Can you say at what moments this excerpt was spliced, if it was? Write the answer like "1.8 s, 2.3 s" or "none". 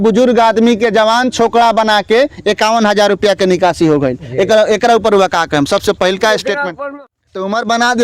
6.7 s